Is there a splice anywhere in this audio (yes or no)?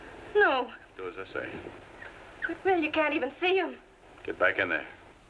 no